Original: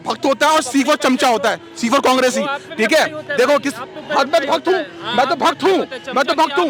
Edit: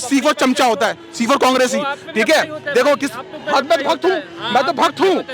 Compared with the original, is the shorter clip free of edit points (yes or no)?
yes